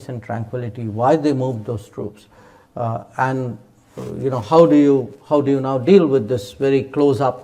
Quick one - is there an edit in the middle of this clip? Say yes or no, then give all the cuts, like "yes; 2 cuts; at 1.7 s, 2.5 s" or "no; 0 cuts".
no; 0 cuts